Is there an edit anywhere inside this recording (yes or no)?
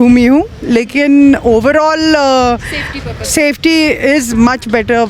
no